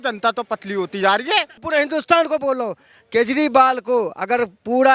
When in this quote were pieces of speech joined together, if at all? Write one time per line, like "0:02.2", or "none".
0:01.6